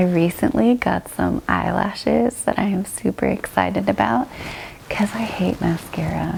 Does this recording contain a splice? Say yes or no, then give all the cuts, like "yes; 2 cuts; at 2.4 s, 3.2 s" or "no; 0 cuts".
no; 0 cuts